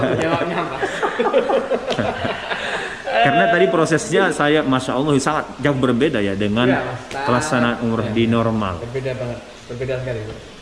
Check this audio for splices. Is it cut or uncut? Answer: uncut